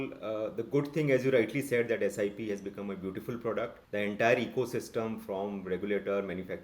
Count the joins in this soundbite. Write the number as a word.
one